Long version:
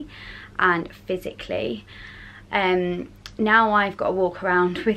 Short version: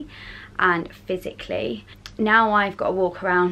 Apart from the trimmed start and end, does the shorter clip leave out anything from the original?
yes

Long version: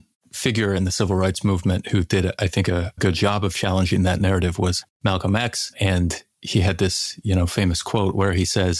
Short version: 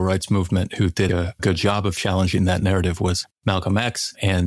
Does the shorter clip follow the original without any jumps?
no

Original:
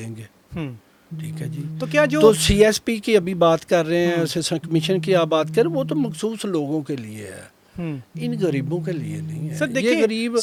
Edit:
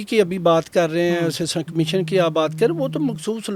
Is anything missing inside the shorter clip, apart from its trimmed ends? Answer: no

